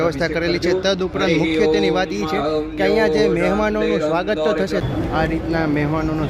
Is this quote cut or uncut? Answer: cut